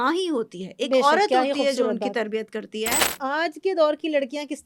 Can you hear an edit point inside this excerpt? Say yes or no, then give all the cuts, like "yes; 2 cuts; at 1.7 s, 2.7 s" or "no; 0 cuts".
yes; 1 cut; at 3.1 s